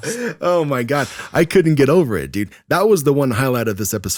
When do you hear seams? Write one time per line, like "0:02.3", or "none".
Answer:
none